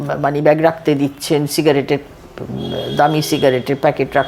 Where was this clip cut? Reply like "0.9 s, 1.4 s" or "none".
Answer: none